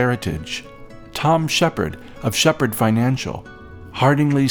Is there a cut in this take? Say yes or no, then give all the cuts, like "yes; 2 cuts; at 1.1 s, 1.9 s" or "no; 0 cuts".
no; 0 cuts